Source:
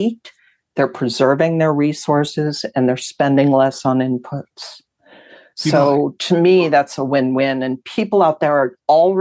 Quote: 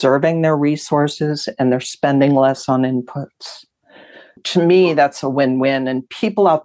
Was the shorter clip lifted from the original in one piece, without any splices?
no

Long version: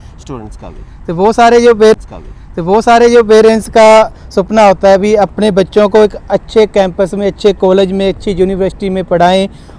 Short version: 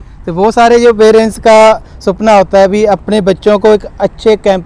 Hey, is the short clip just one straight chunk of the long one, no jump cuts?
no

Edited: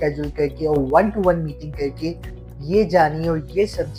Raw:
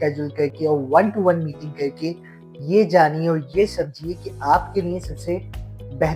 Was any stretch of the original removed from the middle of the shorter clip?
no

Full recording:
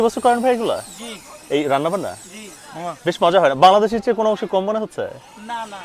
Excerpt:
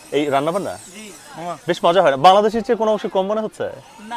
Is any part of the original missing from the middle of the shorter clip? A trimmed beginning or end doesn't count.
no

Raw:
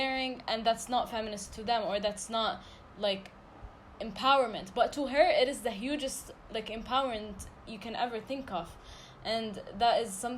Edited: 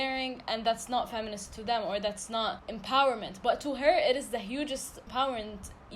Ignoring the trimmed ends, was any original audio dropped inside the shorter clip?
yes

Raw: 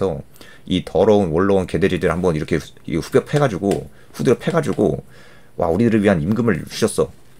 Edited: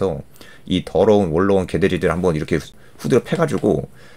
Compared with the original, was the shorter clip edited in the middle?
yes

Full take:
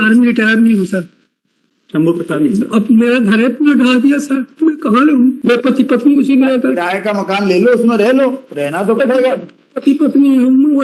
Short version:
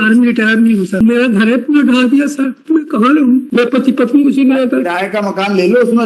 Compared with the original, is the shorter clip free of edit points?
no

